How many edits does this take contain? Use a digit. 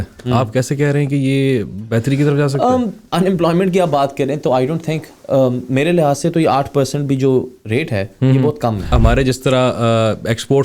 2